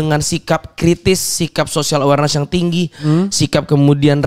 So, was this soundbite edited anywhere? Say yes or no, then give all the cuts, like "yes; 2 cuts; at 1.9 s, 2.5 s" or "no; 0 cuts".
no; 0 cuts